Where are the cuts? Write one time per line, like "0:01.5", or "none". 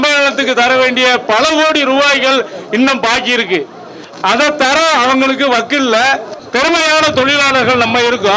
0:06.3